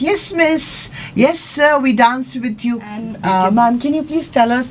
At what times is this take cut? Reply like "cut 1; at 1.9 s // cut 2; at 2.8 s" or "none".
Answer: cut 1; at 3.1 s